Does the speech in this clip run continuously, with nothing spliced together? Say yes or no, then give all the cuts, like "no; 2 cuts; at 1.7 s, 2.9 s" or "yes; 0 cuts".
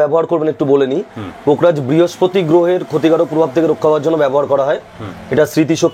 yes; 0 cuts